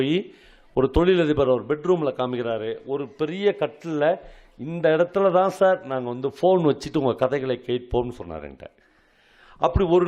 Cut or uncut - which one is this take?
uncut